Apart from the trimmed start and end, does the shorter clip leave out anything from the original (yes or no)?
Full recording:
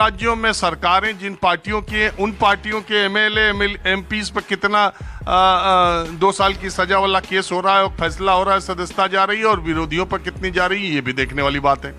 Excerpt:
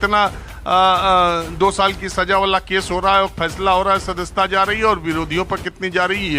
no